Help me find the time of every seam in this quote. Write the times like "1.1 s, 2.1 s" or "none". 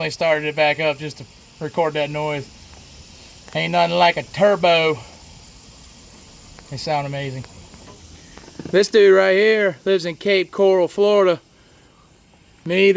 none